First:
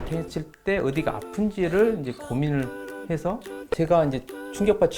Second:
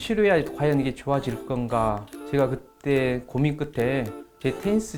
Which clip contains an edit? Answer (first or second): first